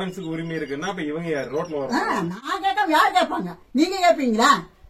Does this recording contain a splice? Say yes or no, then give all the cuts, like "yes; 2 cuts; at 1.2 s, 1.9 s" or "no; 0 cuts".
yes; 1 cut; at 2.4 s